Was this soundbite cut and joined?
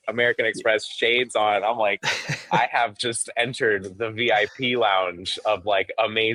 no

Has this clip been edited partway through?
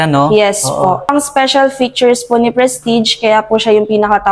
yes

